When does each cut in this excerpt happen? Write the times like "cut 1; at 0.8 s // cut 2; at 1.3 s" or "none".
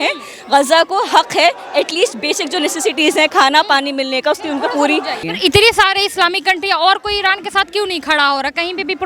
cut 1; at 5.2 s